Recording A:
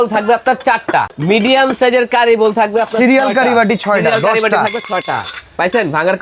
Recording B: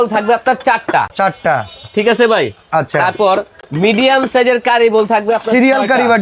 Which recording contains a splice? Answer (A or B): A